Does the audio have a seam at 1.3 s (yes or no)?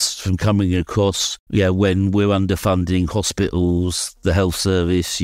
yes